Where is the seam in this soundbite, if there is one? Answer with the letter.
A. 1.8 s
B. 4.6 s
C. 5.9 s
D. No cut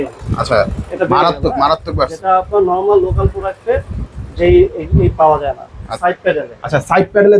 C